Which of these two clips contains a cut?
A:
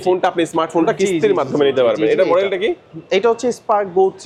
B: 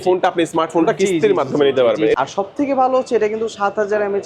B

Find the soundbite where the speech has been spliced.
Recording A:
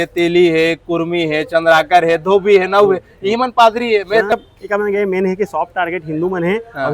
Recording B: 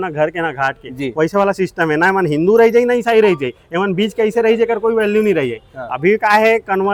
A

